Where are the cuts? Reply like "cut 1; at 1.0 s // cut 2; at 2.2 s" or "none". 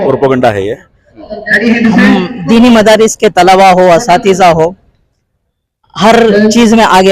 cut 1; at 1.3 s